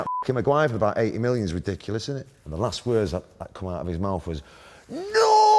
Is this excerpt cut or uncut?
cut